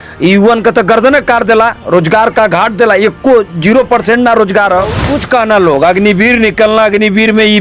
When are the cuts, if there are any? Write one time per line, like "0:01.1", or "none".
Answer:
0:05.1